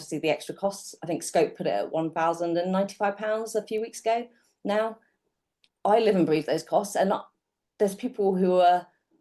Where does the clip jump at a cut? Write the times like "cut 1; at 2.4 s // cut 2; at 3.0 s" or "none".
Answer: none